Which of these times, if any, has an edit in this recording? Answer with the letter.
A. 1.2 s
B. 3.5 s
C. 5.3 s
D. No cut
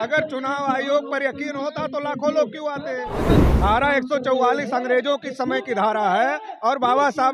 B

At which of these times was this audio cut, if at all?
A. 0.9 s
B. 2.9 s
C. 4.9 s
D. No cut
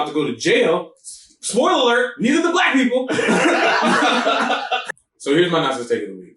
C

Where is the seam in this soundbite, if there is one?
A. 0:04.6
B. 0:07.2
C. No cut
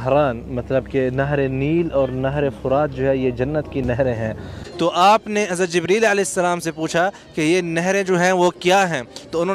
A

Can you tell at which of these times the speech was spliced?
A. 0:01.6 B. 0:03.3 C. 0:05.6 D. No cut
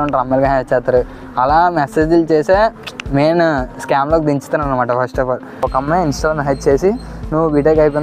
C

